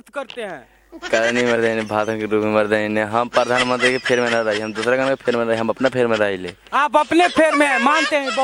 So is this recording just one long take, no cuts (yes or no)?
yes